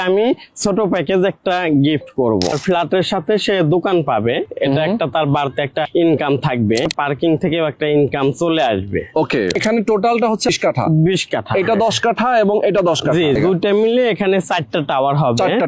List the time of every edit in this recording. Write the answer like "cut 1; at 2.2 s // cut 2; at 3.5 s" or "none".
cut 1; at 2.6 s // cut 2; at 5.9 s // cut 3; at 6.8 s // cut 4; at 9.5 s // cut 5; at 10.5 s // cut 6; at 13.4 s

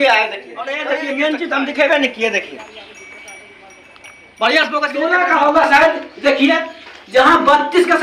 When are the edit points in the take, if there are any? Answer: cut 1; at 1.0 s // cut 2; at 4.9 s

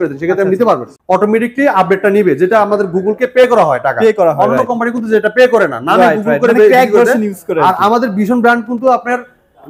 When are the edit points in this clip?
cut 1; at 0.9 s

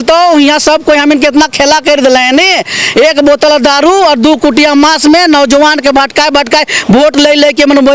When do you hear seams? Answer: none

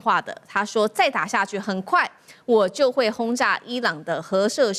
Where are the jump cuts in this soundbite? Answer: none

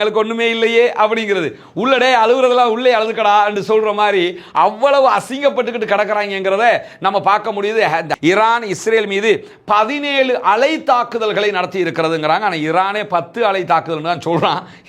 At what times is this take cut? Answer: cut 1; at 8.2 s

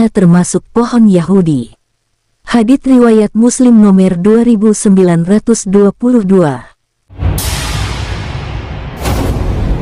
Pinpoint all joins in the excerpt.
cut 1; at 7.1 s

